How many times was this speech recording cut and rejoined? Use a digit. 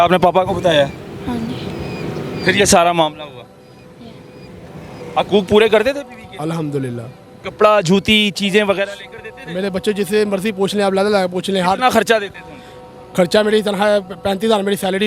0